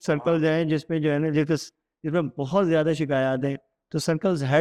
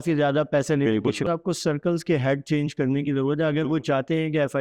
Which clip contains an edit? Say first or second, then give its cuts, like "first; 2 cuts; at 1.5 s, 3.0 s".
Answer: second; 1 cut; at 1.3 s